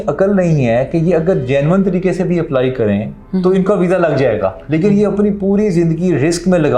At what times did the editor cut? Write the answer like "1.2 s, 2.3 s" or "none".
4.6 s

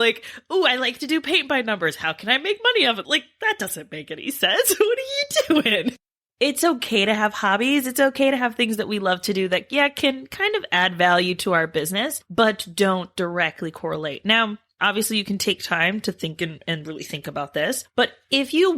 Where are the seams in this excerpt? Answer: 6.2 s

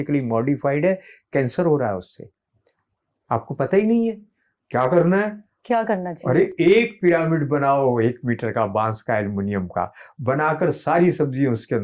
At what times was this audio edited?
none

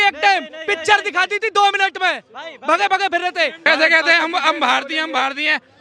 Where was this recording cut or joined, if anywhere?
3.7 s

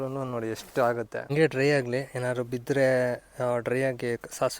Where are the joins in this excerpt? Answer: 1.3 s

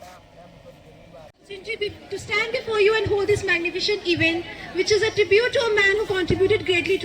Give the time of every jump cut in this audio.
1.3 s

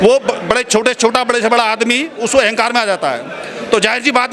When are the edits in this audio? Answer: none

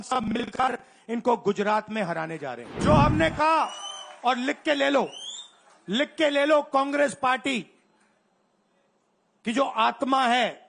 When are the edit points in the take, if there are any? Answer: 2.7 s

